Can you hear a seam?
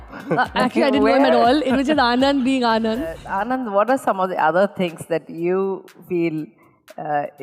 yes; 1 cut; at 3.3 s

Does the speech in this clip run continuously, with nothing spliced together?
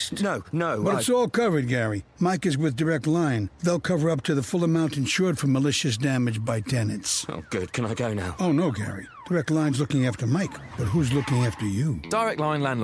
yes; 0 cuts

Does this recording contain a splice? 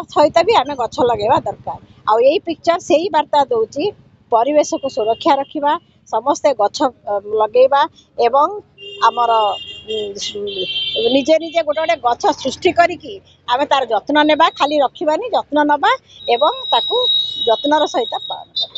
no; 0 cuts

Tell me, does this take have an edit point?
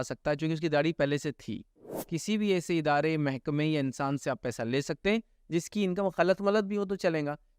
yes; 1 cut; at 2.0 s

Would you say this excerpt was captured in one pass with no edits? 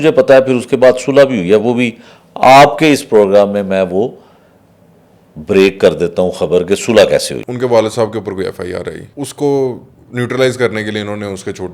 no; 2 cuts; at 7.4 s, 9.0 s

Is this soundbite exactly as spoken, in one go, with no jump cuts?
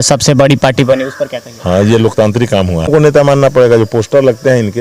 no; 1 cut; at 2.9 s

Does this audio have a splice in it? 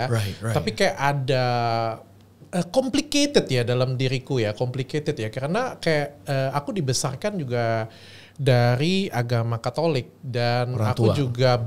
no; 0 cuts

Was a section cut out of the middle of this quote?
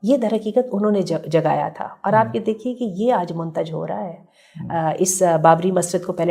no; 0 cuts

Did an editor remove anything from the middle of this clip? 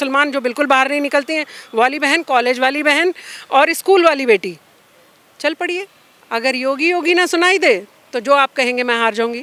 no; 0 cuts

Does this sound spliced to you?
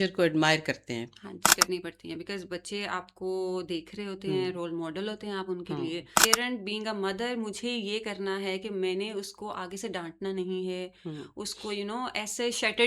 yes; 2 cuts; at 1.5 s, 6.2 s

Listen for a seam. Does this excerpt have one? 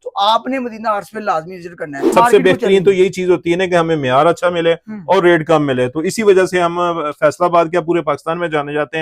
yes; 1 cut; at 2.0 s

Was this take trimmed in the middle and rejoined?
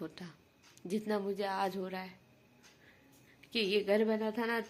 no; 0 cuts

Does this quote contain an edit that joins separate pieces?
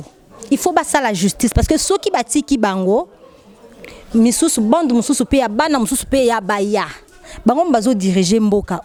no; 0 cuts

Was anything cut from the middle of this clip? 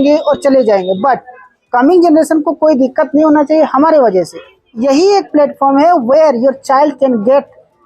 yes; 1 cut; at 4.7 s

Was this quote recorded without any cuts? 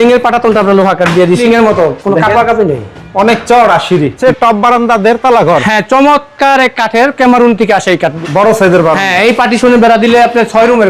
no; 3 cuts; at 1.4 s, 4.2 s, 8.2 s

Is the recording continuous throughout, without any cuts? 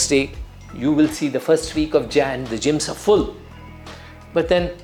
yes; 0 cuts

